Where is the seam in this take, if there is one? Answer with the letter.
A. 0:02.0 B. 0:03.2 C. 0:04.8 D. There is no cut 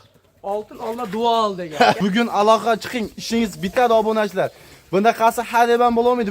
A